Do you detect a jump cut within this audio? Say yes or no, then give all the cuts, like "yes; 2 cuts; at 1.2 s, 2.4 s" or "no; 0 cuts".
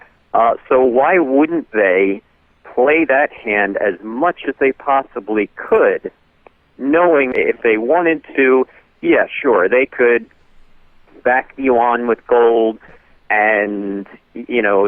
yes; 1 cut; at 7.3 s